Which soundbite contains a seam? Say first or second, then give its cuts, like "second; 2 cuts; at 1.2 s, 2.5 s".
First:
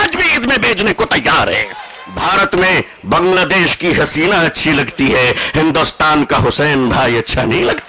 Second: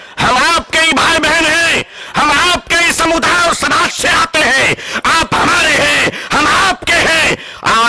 first; 1 cut; at 2.0 s